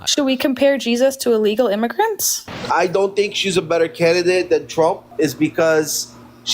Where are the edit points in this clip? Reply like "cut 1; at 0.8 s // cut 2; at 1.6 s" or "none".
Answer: cut 1; at 2.5 s // cut 2; at 5.1 s